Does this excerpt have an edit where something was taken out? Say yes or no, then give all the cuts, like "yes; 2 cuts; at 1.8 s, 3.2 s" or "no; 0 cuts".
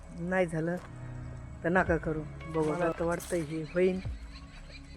yes; 1 cut; at 2.8 s